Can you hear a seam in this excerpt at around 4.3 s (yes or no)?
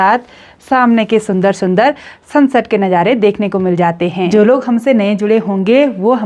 yes